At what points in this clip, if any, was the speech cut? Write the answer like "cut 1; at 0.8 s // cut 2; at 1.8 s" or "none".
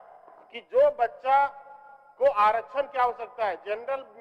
none